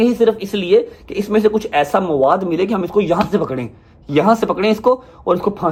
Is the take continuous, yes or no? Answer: yes